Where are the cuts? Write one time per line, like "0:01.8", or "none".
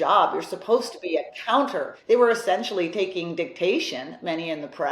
0:01.9